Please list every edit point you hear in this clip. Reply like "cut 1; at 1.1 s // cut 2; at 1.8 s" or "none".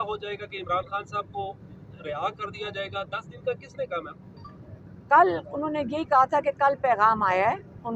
none